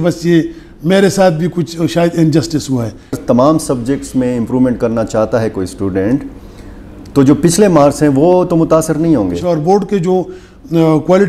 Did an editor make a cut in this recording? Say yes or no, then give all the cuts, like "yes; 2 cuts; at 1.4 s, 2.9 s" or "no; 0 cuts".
yes; 2 cuts; at 3.2 s, 9.4 s